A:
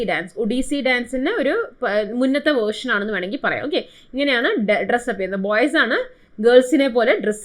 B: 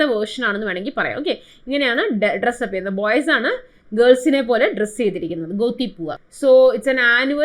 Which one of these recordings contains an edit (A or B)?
B